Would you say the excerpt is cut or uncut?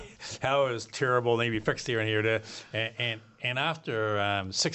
uncut